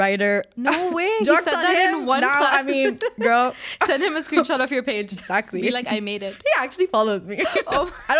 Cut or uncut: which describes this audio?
uncut